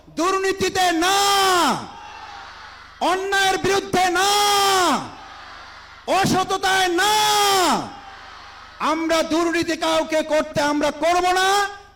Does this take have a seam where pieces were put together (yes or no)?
no